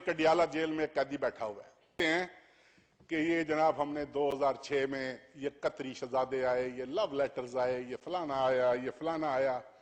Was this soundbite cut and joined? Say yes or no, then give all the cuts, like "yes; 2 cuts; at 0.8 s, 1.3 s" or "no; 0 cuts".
no; 0 cuts